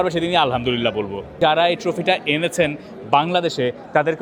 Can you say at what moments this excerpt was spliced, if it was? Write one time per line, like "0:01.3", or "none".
0:01.4